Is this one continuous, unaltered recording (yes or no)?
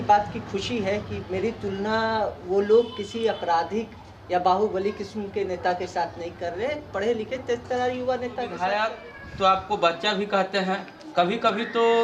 no